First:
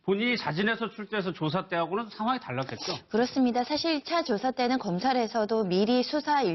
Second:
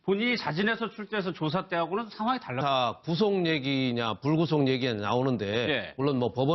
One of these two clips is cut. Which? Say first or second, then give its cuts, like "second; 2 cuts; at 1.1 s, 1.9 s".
first; 1 cut; at 2.6 s